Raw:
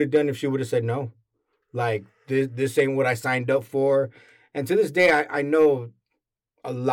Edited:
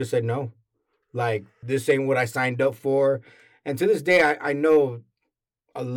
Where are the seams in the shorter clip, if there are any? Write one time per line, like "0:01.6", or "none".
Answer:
0:01.6

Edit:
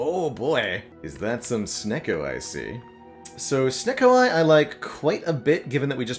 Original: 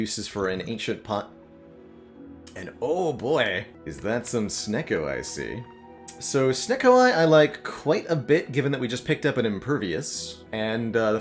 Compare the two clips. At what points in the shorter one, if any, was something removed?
none

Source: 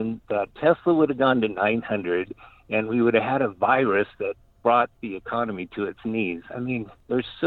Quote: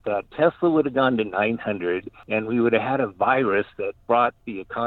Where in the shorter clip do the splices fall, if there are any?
0:02.1
0:04.0

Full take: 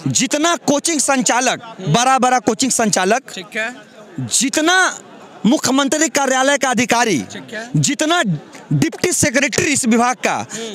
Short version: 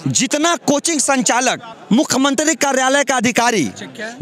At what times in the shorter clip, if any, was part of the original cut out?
0:01.7

